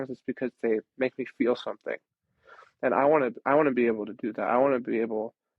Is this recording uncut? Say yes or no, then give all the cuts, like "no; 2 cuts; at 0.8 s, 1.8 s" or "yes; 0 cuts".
yes; 0 cuts